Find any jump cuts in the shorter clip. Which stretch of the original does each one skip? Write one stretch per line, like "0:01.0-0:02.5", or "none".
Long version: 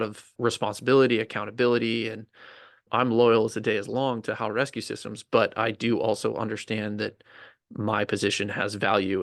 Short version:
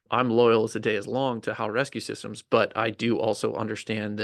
none